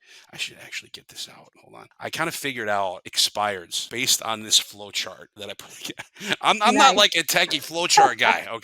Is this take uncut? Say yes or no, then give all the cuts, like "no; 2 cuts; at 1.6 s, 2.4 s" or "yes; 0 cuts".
no; 4 cuts; at 1.6 s, 3.1 s, 3.8 s, 5.3 s